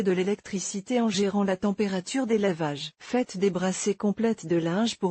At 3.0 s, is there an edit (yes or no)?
yes